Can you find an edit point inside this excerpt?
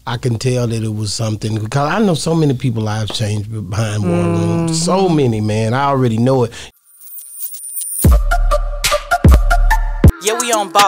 yes; 1 cut; at 6.7 s

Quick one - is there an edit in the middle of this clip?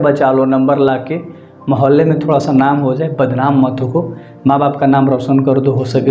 no; 0 cuts

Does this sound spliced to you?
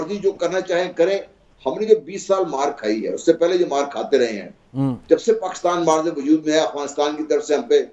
no; 0 cuts

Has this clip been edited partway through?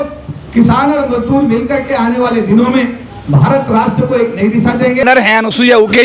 yes; 1 cut; at 5.0 s

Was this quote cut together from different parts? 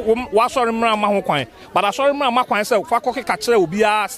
no; 0 cuts

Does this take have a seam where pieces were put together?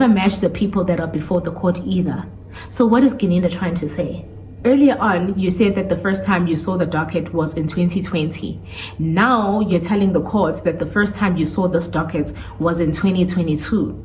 yes; 1 cut; at 4.5 s

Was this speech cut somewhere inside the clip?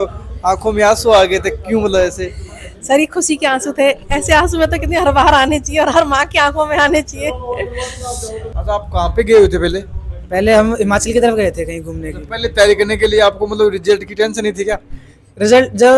yes; 1 cut; at 8.5 s

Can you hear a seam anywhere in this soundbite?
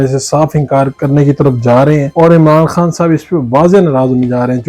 yes; 2 cuts; at 0.9 s, 2.1 s

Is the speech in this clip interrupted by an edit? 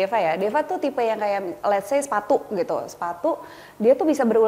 no; 0 cuts

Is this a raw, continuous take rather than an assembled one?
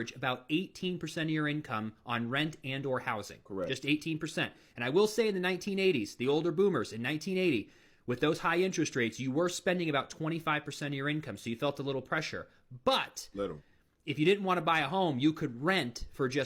yes; 0 cuts

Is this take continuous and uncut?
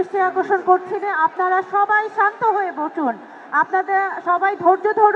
yes; 0 cuts

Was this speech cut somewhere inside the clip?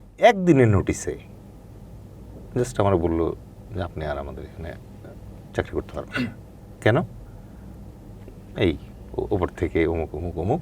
no; 0 cuts

